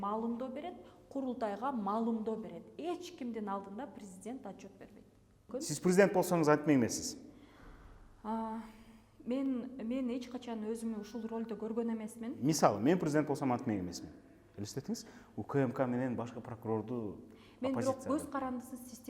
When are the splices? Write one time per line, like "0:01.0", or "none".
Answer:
0:05.5